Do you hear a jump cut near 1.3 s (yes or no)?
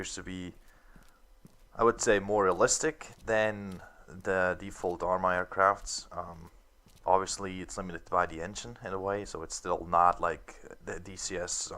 yes